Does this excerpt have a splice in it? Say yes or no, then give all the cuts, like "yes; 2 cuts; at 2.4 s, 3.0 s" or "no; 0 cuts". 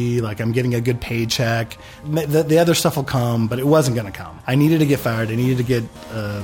no; 0 cuts